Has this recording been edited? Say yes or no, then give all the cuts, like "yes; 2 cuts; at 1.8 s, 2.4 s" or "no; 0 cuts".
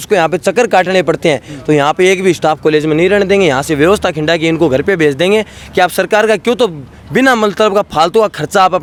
no; 0 cuts